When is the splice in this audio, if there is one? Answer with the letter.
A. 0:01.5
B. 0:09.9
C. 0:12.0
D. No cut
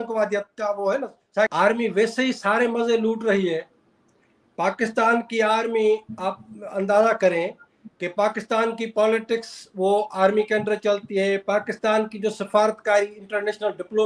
A